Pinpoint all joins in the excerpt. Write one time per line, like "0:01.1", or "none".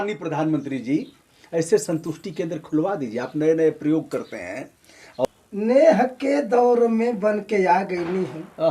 0:05.2